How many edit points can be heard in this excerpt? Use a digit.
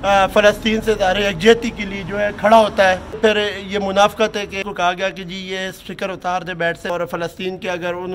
3